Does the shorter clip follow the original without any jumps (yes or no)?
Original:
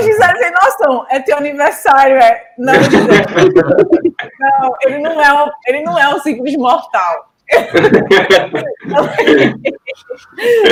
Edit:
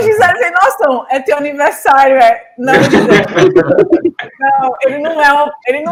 yes